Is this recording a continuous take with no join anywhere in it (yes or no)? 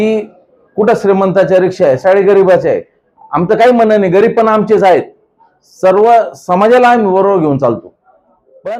yes